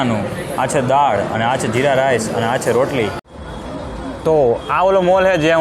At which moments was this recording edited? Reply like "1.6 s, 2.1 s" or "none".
3.3 s